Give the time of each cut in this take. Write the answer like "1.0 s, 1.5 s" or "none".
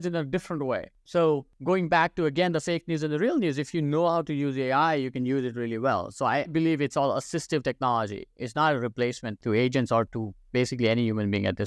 1.0 s, 1.5 s, 6.5 s